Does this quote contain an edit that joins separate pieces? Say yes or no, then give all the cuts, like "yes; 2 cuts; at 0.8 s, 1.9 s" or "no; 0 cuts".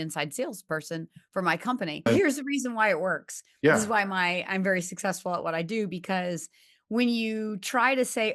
yes; 1 cut; at 2.1 s